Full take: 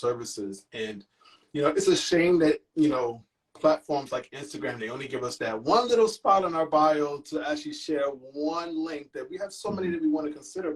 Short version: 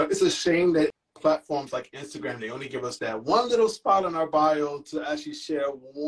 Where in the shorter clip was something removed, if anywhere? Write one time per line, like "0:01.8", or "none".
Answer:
0:01.0